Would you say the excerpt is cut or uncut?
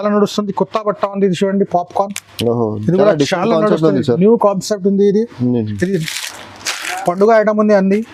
uncut